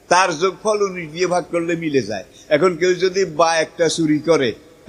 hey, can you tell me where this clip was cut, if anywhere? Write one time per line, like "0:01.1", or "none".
none